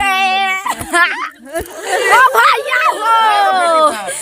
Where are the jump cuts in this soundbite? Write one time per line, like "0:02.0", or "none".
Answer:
0:02.1